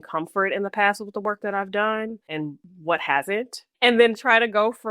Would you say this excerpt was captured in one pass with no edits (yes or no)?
no